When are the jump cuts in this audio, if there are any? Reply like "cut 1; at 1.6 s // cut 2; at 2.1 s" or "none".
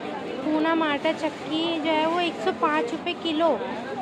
none